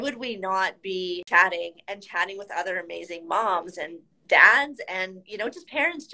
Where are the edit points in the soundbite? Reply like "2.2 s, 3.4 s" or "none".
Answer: 1.2 s